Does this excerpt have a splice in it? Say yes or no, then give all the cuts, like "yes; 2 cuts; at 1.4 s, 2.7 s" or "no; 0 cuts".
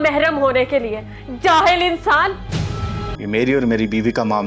yes; 1 cut; at 3.1 s